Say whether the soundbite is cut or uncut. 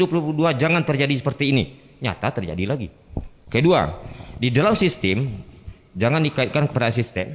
uncut